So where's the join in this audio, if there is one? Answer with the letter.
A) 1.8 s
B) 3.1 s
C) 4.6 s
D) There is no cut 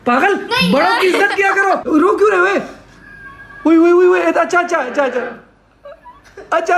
A